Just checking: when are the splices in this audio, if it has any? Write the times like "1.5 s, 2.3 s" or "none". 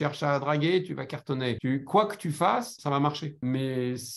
1.6 s, 3.2 s